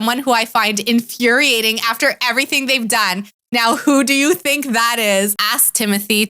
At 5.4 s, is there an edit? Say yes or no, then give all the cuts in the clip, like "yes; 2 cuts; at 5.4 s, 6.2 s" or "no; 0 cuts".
yes; 1 cut; at 5.4 s